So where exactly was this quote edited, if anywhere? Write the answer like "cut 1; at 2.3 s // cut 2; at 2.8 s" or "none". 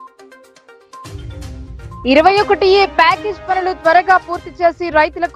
none